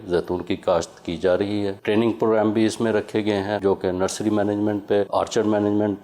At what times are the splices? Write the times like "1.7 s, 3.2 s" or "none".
1.8 s, 3.6 s, 5.1 s